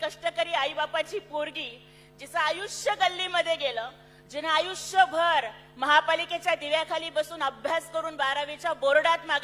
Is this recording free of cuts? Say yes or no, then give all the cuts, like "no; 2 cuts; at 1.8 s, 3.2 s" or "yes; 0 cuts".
yes; 0 cuts